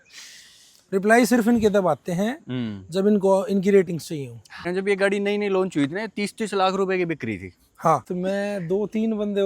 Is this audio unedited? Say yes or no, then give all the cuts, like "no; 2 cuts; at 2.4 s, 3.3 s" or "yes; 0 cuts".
no; 2 cuts; at 4.6 s, 8.1 s